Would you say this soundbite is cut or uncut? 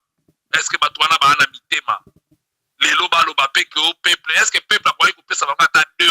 uncut